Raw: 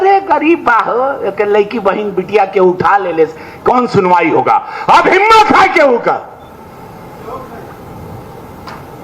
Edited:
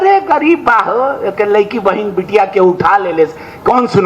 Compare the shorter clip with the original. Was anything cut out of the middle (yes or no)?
no